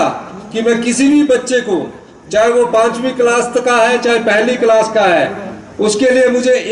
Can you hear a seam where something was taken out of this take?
no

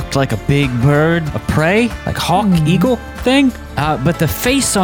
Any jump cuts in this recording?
yes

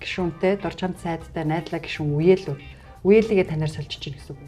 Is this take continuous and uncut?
yes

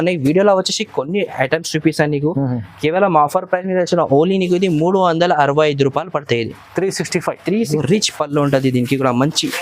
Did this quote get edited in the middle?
yes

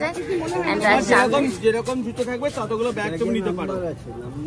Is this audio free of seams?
yes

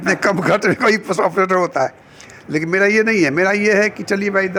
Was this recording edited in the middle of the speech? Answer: no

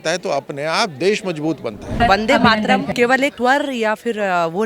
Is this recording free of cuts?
no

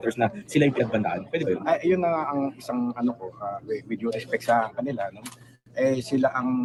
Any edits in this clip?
no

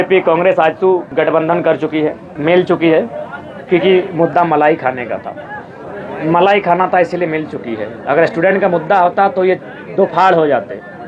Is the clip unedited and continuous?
no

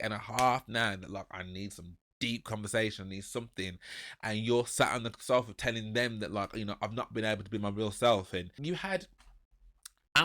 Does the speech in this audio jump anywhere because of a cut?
yes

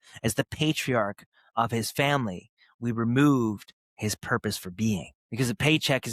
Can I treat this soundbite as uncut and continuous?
no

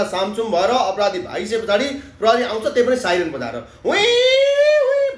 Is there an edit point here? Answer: no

